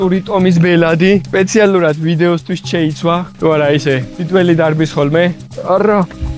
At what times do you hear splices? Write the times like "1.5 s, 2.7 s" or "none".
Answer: 5.5 s